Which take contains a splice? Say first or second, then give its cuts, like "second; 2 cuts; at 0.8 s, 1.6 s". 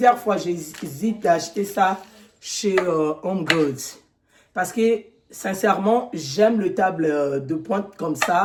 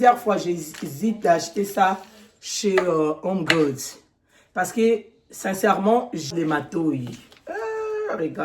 second; 1 cut; at 6.3 s